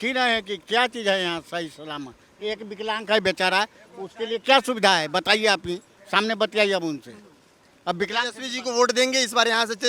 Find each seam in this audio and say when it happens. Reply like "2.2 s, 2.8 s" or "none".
none